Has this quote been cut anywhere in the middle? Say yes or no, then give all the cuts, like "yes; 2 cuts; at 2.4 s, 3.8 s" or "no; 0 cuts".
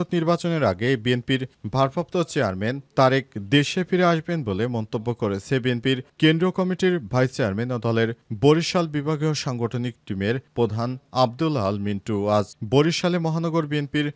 no; 0 cuts